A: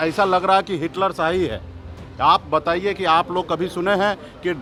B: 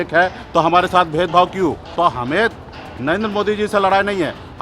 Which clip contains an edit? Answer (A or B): B